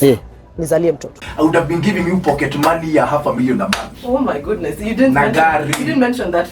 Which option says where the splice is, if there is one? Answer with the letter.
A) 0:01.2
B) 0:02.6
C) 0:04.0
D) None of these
A